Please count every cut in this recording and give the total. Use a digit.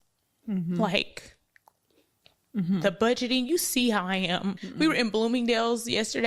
1